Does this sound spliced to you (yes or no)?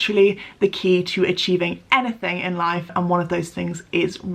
yes